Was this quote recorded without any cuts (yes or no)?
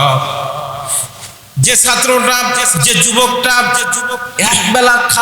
no